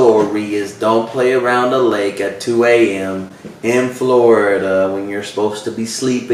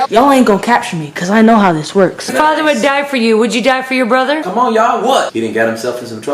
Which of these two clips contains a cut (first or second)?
second